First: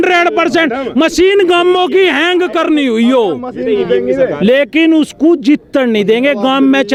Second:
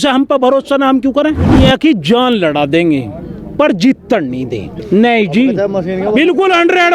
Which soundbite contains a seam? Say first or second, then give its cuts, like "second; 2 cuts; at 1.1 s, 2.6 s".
second; 2 cuts; at 1.5 s, 4.8 s